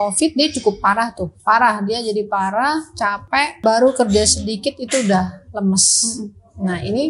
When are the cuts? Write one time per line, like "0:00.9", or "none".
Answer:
0:01.3
0:03.5